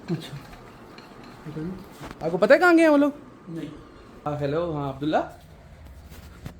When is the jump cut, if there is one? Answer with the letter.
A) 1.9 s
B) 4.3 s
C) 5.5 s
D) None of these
B